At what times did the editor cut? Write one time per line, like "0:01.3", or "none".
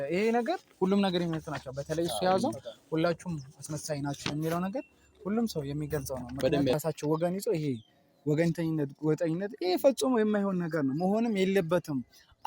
0:06.7

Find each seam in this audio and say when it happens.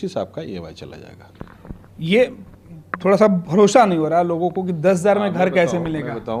none

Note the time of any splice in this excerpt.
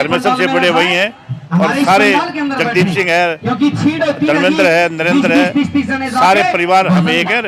none

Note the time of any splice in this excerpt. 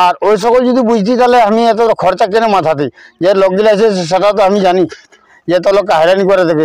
none

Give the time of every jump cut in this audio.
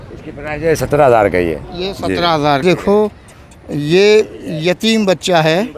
0:02.6

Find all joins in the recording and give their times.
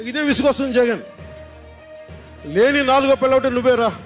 none

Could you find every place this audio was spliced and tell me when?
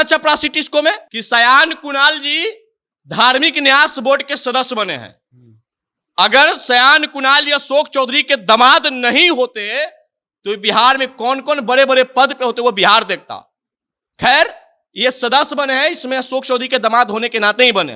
0:01.1

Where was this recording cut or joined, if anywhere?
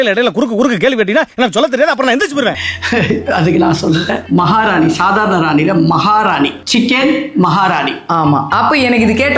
none

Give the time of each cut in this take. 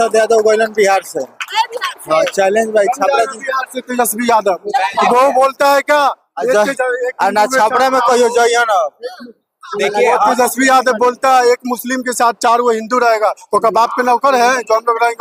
none

